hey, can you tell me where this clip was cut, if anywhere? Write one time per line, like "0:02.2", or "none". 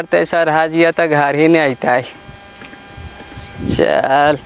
none